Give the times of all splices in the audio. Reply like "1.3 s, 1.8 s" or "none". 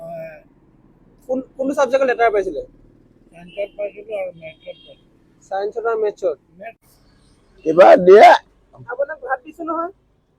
6.8 s